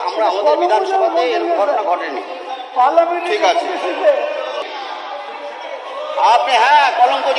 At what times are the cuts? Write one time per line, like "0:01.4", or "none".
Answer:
0:04.6

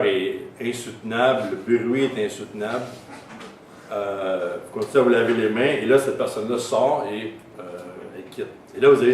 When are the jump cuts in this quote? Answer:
0:04.2

